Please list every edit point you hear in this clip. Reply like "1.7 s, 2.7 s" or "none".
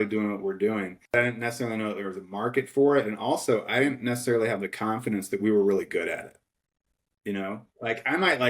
1.1 s